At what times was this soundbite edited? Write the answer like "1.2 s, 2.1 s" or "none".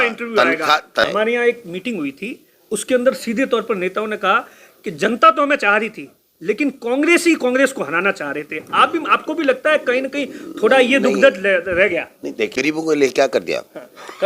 1.1 s, 12.5 s